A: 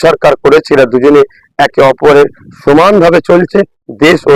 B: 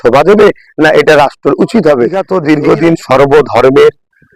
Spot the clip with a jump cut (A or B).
B